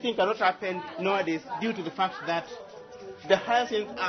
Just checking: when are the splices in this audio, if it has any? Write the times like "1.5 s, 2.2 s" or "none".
none